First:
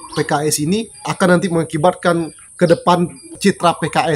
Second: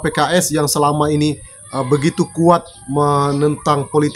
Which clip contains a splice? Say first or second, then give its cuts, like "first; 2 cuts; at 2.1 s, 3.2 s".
first; 3 cuts; at 1.1 s, 2.4 s, 3.2 s